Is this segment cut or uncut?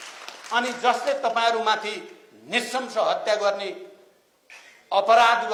uncut